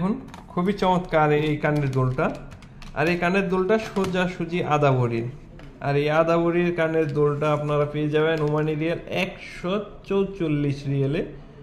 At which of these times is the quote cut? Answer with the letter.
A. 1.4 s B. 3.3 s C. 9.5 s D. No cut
A